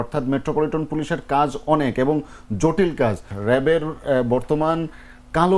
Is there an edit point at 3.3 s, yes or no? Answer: yes